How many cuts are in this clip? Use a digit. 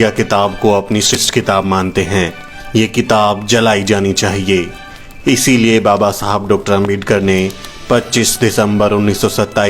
1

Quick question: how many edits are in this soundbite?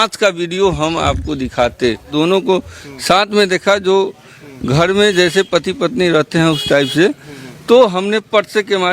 1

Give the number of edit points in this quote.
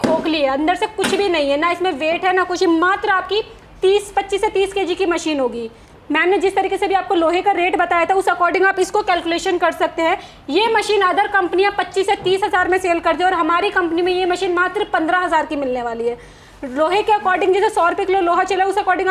0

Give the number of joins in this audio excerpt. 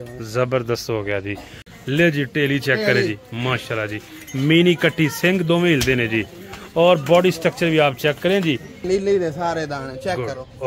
2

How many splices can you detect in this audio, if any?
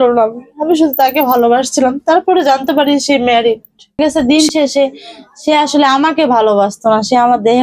1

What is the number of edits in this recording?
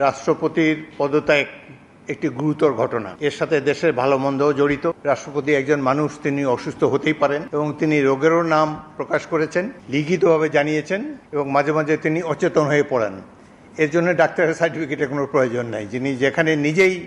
5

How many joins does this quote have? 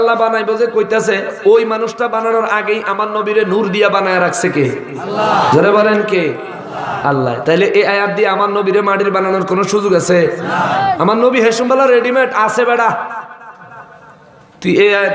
0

